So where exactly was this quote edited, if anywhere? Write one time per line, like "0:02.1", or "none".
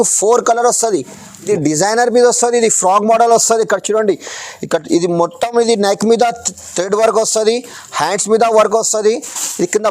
0:01.5